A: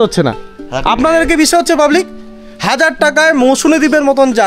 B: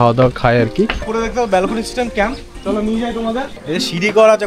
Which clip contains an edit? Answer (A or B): B